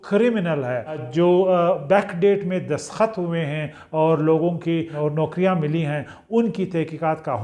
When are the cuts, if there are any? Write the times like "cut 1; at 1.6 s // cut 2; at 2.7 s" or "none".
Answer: cut 1; at 1.0 s // cut 2; at 4.9 s